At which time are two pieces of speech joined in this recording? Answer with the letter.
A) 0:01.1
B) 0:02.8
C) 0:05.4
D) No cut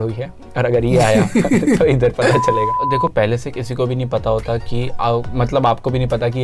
B